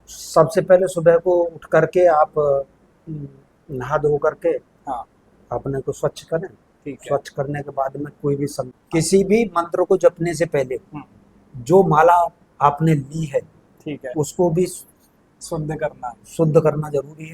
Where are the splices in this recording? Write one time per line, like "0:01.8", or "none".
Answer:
0:08.7

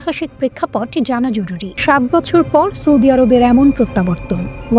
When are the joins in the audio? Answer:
0:01.7

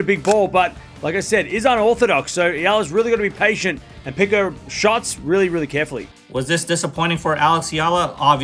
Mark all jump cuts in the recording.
0:06.0

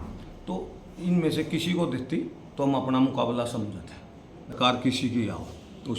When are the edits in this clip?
0:04.5

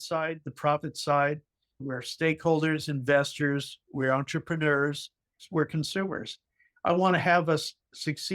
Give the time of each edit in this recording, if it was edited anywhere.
0:01.8
0:05.4

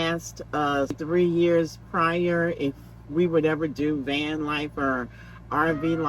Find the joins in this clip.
0:01.0

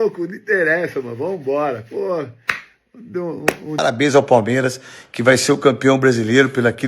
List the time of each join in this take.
0:03.8

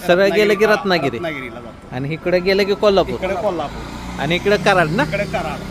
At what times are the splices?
none

